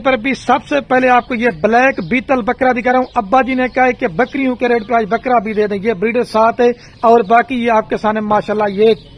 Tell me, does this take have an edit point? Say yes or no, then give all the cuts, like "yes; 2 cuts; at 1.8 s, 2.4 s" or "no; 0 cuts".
no; 0 cuts